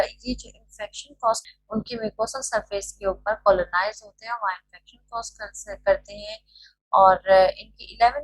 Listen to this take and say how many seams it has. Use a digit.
1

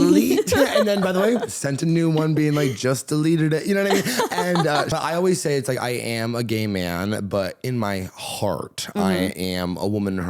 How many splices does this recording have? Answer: 1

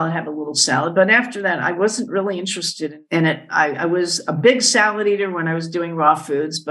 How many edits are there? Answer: 1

